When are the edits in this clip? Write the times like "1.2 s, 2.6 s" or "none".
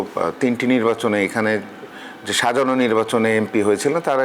none